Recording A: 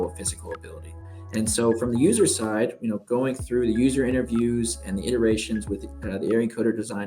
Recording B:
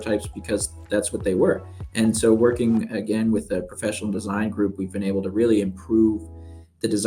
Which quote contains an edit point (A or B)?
A